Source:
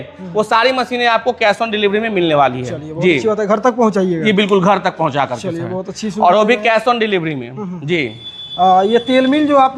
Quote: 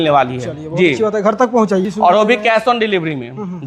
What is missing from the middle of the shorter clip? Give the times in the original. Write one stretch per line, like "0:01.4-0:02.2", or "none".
0:04.1-0:06.0